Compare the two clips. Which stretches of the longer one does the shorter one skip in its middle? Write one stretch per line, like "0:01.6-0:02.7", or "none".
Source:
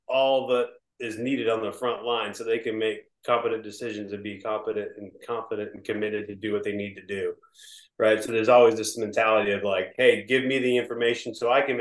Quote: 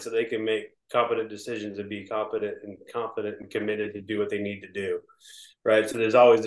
none